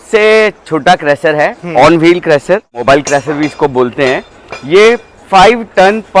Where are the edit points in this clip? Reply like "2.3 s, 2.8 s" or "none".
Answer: 2.8 s